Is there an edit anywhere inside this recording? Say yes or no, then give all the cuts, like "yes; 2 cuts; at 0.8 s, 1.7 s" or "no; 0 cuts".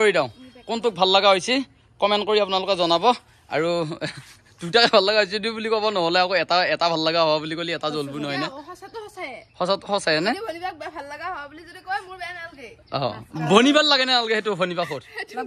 no; 0 cuts